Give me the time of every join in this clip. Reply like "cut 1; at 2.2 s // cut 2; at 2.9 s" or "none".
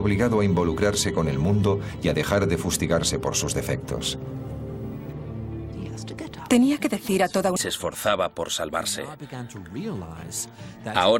none